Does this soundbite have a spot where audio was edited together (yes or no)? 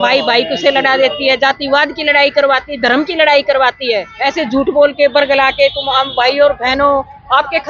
yes